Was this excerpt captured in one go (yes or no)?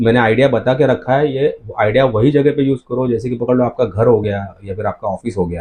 yes